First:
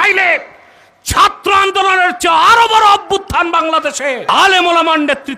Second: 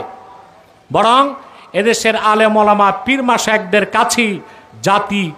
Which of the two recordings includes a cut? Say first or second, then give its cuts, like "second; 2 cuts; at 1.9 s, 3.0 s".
first; 1 cut; at 4.3 s